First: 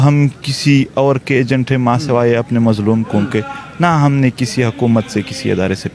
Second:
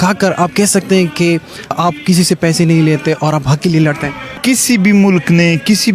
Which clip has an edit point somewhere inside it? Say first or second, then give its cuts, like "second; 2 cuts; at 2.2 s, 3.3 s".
second; 2 cuts; at 1.7 s, 4.4 s